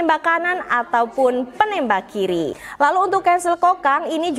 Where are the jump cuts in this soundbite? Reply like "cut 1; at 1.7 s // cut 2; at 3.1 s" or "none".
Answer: cut 1; at 2.6 s